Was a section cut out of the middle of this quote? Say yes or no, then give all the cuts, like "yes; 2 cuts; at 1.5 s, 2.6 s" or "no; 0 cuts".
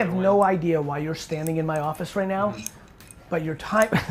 no; 0 cuts